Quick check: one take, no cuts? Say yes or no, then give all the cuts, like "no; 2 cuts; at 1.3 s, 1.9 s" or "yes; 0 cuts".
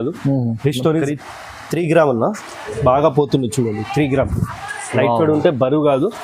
no; 1 cut; at 1.0 s